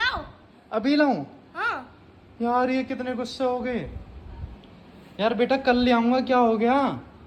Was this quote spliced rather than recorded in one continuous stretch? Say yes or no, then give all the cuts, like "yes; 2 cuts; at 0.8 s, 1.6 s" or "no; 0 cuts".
no; 0 cuts